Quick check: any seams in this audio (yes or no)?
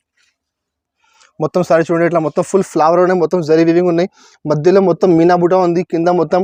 no